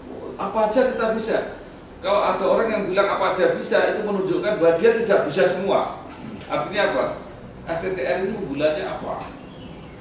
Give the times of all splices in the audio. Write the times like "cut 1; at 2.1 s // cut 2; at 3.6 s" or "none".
cut 1; at 6.3 s